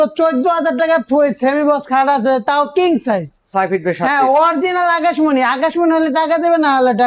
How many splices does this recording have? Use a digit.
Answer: 0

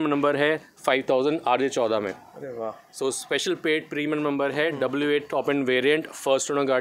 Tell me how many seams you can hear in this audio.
0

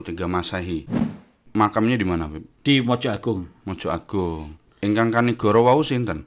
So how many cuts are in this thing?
2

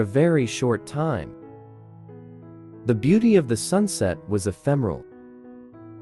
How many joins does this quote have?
2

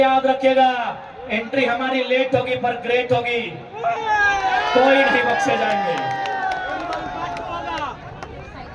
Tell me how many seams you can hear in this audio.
0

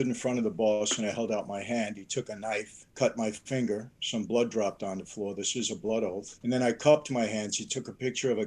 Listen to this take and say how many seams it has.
2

